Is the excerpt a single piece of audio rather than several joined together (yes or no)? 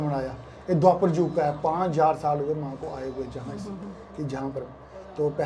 yes